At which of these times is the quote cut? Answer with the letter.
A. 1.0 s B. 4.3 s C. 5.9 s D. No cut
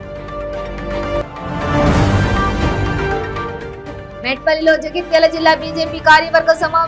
A